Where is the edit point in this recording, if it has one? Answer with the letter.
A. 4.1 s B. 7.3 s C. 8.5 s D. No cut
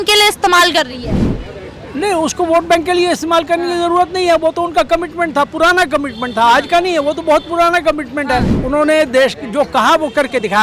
C